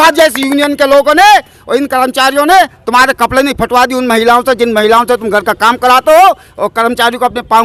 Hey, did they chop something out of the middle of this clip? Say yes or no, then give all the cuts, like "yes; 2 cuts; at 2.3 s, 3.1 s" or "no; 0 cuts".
no; 0 cuts